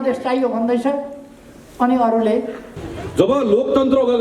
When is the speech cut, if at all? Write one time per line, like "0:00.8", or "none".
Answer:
0:02.6

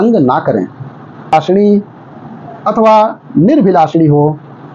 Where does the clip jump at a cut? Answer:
none

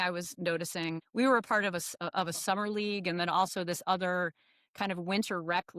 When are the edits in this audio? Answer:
0:01.0

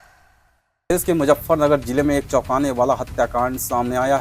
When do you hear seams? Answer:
0:00.9

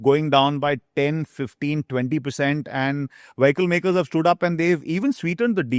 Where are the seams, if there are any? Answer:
none

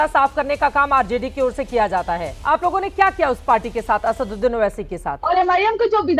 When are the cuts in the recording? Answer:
0:02.3
0:05.1

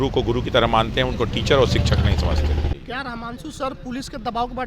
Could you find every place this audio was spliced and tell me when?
0:02.7

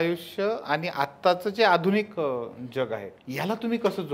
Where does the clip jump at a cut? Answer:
0:03.2

